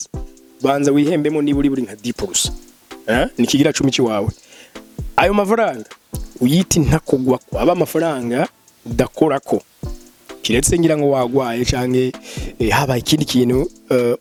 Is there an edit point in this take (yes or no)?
no